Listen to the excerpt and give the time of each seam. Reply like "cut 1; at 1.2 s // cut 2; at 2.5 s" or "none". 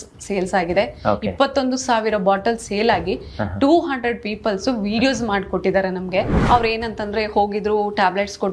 cut 1; at 6.3 s